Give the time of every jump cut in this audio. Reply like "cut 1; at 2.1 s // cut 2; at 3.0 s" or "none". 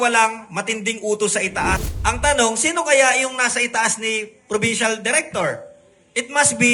cut 1; at 1.8 s